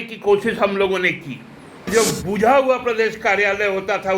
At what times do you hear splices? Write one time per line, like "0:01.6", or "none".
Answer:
0:01.9